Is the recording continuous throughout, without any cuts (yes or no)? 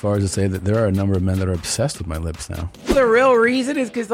no